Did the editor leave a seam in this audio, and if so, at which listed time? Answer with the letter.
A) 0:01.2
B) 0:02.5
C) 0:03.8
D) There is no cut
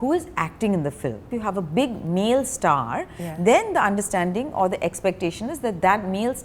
A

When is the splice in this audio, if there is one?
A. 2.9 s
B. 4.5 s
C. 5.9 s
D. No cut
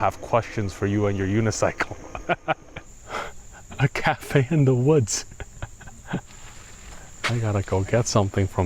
A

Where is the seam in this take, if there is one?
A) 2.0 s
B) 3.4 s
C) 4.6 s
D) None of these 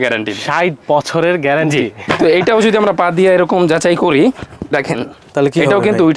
D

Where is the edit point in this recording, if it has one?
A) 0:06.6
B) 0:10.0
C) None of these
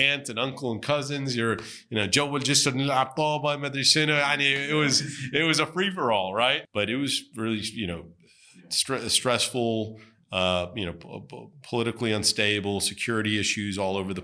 A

